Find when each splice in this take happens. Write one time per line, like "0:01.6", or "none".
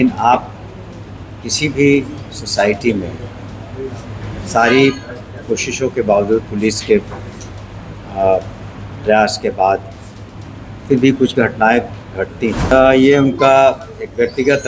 0:12.7

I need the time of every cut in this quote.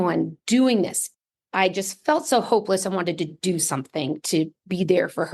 0:01.0

